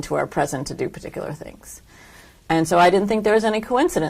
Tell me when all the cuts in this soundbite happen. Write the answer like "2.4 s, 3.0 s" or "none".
2.9 s